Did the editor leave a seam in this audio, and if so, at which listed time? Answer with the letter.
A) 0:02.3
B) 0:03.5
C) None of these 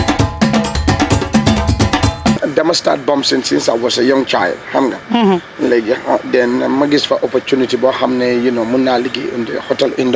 A